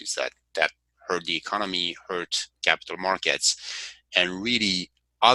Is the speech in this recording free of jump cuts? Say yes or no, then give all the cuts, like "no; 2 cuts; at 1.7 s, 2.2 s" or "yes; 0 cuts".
yes; 0 cuts